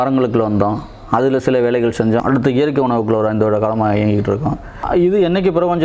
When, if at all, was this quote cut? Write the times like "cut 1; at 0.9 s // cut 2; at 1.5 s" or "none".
cut 1; at 2.2 s // cut 2; at 4.7 s

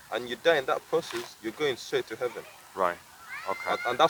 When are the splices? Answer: none

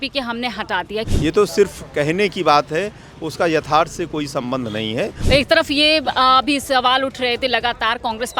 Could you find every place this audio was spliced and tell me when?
cut 1; at 1.1 s // cut 2; at 5.2 s

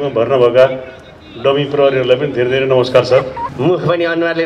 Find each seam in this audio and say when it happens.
cut 1; at 3.5 s

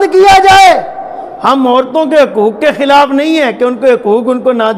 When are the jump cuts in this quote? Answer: none

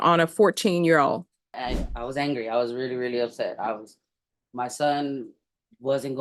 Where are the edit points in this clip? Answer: cut 1; at 1.6 s

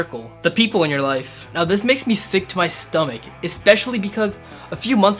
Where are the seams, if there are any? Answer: none

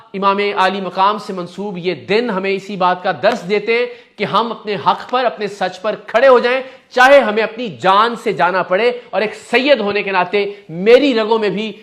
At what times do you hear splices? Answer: none

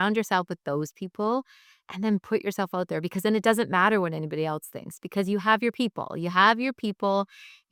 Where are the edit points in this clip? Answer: none

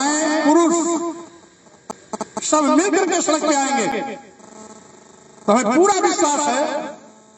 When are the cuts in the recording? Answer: none

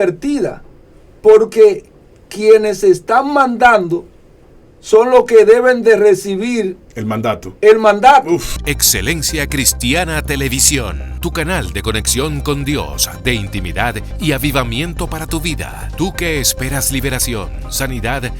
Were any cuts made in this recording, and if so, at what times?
cut 1; at 8.5 s

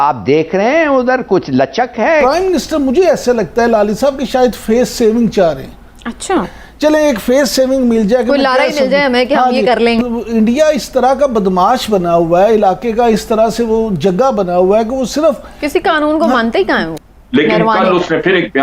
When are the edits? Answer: cut 1; at 2.2 s // cut 2; at 6.5 s // cut 3; at 10.0 s // cut 4; at 16.9 s

